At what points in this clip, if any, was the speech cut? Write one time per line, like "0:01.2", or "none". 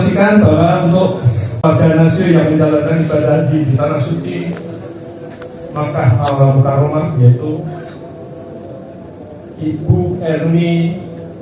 0:01.4